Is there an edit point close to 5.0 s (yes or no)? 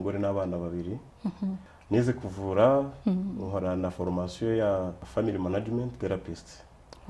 yes